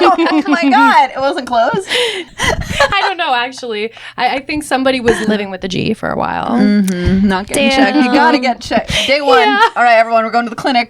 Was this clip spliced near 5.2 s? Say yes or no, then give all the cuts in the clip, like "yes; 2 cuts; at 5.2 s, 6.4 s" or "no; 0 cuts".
yes; 2 cuts; at 2.3 s, 5.2 s